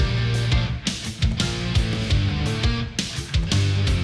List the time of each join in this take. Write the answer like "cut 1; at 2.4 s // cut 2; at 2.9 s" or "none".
none